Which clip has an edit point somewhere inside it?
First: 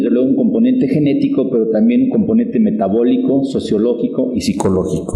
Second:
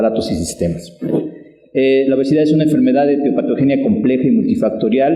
second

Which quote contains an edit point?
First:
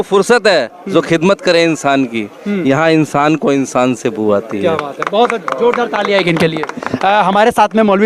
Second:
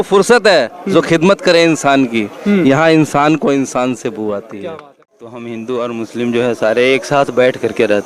second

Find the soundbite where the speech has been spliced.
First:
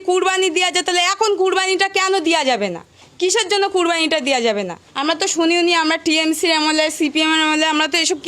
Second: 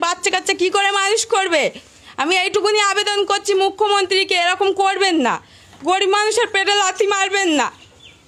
first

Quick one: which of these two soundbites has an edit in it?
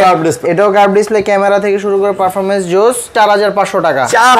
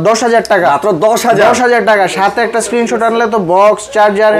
first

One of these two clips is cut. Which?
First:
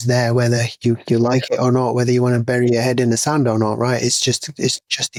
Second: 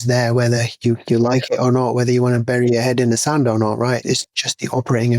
second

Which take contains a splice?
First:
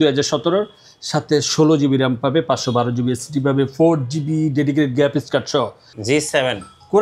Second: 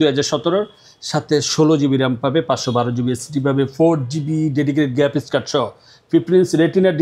first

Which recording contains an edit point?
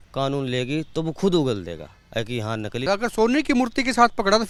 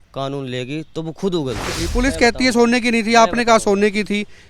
second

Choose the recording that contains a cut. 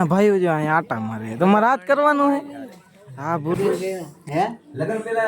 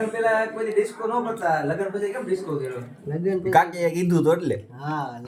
first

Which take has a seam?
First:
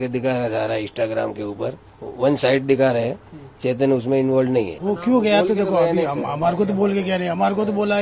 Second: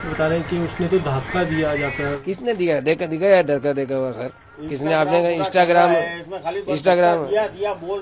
first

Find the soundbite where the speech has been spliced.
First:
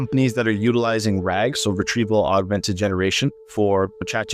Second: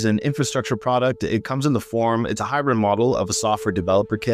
first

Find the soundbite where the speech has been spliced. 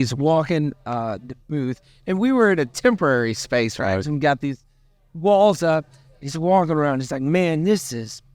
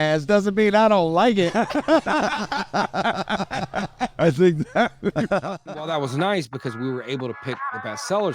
second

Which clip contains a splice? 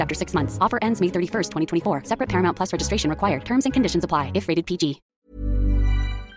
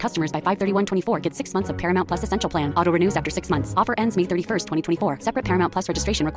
first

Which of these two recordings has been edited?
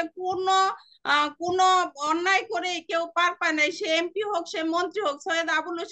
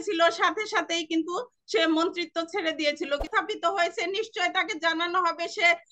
second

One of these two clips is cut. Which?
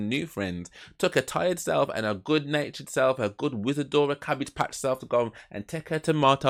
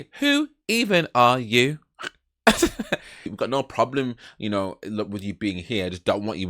second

